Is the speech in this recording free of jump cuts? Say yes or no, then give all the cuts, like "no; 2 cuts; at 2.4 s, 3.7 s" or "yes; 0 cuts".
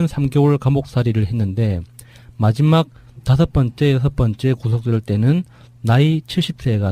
no; 1 cut; at 1.0 s